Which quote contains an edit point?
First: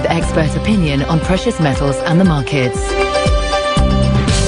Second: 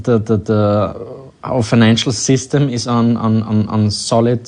second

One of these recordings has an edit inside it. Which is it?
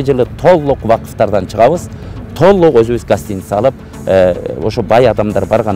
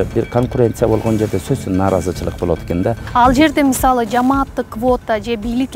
second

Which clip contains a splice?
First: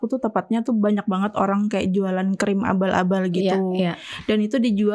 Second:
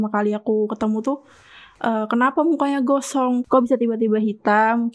second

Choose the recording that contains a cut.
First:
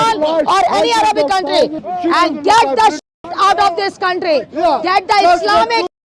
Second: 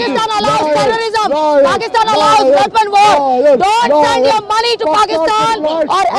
first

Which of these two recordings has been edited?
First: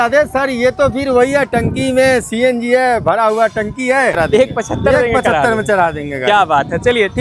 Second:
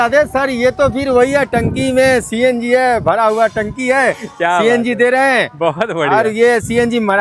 first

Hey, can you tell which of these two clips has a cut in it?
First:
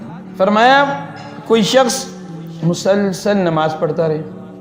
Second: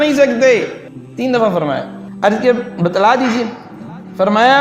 second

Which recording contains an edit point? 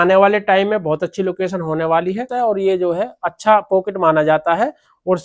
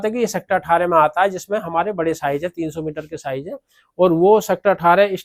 first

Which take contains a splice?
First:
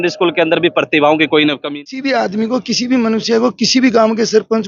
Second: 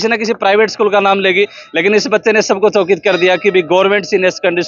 first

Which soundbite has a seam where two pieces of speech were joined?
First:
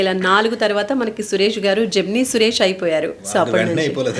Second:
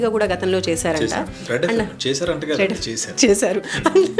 first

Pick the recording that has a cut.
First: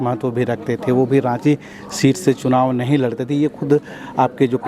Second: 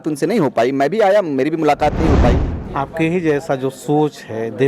second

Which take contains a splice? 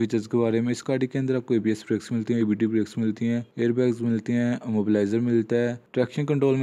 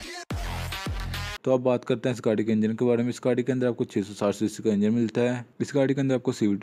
second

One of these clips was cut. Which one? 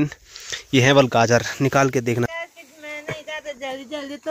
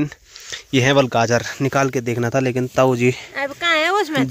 first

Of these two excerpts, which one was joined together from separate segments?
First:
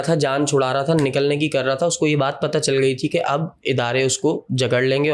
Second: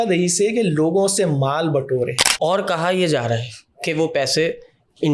second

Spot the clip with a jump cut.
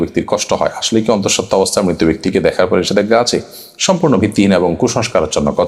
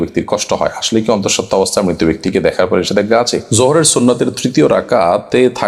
second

